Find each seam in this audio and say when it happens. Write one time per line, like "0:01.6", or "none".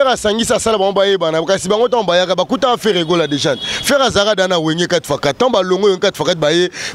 none